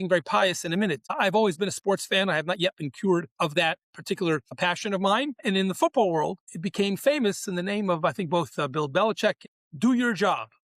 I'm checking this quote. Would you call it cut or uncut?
cut